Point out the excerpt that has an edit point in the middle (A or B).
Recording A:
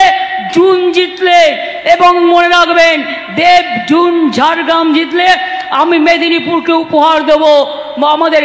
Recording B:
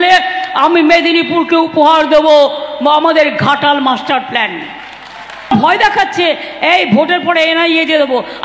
B